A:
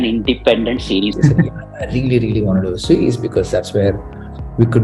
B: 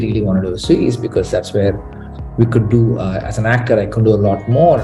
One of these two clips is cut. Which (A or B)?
A